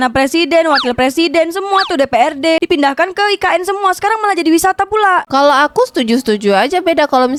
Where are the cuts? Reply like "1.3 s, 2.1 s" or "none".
none